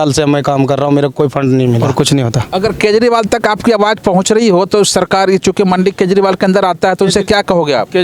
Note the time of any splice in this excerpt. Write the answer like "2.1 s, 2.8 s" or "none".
1.8 s